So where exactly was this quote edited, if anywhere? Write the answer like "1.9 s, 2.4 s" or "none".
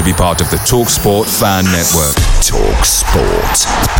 none